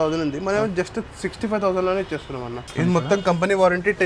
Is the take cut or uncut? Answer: cut